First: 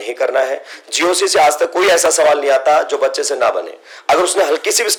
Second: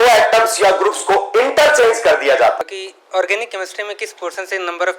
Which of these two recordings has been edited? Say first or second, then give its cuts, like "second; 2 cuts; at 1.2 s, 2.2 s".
second; 1 cut; at 2.6 s